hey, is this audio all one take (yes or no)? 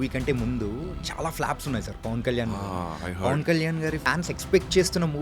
no